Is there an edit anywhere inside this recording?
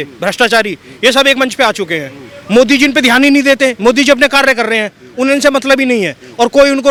no; 0 cuts

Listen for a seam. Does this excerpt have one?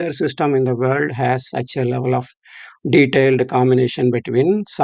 no; 0 cuts

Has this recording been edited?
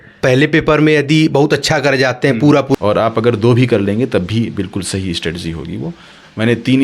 yes; 1 cut; at 2.8 s

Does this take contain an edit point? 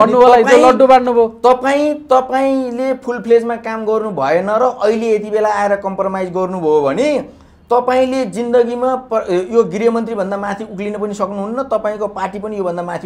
no; 0 cuts

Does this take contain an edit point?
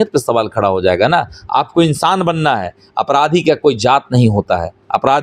no; 0 cuts

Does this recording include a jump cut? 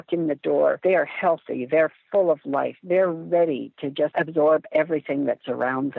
yes; 2 cuts; at 0.8 s, 4.1 s

